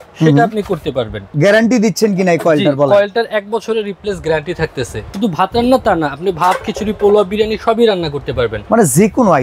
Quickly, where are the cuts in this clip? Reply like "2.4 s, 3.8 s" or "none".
1.3 s, 5.1 s